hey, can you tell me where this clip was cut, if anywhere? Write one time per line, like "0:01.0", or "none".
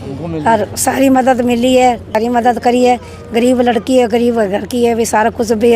0:02.1